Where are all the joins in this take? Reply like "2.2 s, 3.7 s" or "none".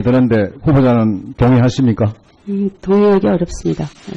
1.1 s